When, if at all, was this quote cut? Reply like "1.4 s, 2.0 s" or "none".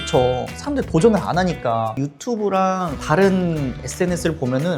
2.0 s